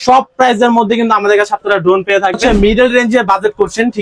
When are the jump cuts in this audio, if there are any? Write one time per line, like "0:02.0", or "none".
0:02.4